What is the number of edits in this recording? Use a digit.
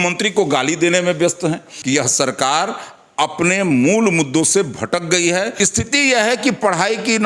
2